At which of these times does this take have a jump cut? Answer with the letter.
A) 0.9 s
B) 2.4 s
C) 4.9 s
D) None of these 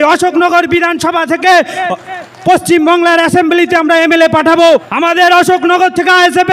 C